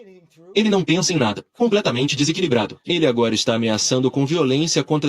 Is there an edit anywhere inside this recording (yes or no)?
yes